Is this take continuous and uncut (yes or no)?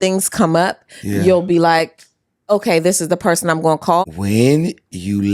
no